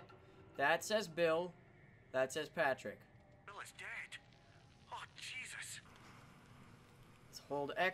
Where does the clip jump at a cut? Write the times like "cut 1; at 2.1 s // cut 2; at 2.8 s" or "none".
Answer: cut 1; at 5.9 s